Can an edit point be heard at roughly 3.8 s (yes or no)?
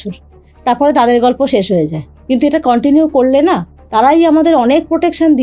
no